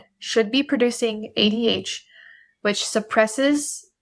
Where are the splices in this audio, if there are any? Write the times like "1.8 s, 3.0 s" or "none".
none